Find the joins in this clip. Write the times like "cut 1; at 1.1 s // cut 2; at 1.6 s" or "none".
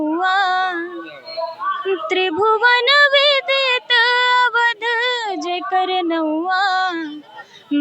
none